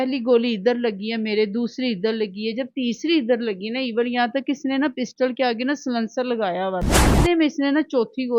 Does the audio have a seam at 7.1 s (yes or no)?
yes